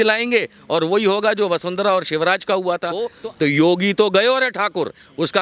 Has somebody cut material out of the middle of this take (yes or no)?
yes